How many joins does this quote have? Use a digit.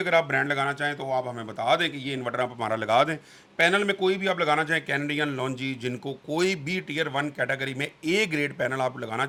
0